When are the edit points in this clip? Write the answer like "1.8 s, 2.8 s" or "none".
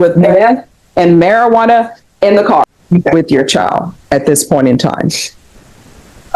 2.7 s

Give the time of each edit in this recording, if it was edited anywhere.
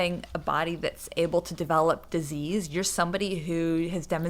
none

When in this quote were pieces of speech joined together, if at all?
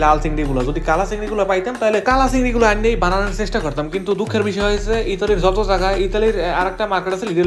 none

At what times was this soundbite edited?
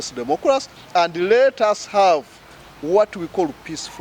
none

